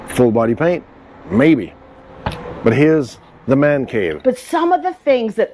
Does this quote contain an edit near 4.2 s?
yes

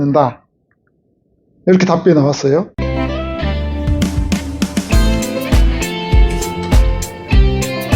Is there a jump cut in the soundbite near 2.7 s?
yes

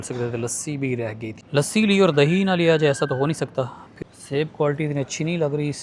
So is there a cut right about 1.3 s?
yes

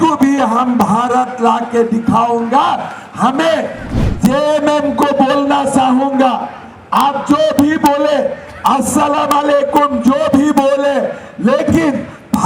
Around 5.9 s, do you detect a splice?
no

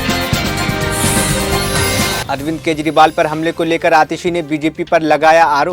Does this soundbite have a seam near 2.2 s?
yes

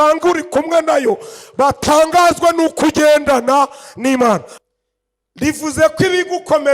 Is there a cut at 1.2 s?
no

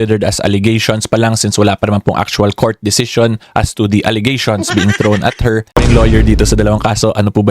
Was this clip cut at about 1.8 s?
no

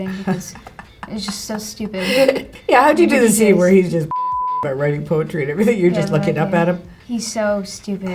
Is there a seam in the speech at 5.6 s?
no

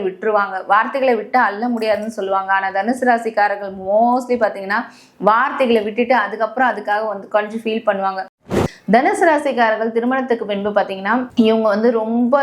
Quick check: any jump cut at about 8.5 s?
yes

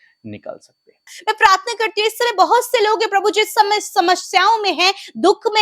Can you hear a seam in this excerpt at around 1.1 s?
yes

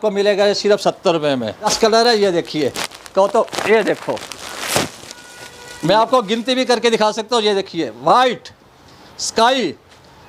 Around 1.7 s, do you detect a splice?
yes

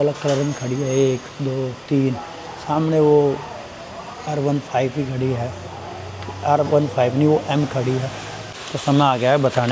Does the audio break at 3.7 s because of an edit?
no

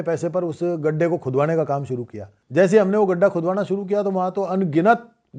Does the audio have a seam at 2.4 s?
no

